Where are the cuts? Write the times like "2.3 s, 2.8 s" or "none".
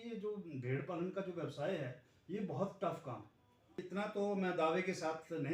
3.8 s

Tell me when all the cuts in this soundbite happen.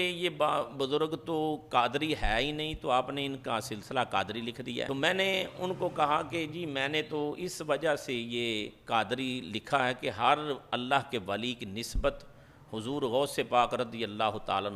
4.9 s

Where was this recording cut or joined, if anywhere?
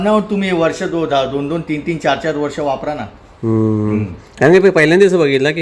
none

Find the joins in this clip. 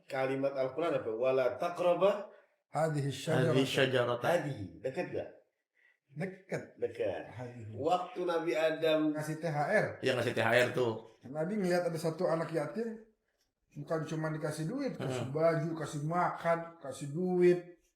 9.2 s

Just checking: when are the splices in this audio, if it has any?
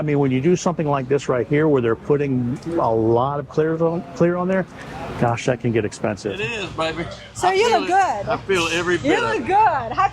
6.4 s

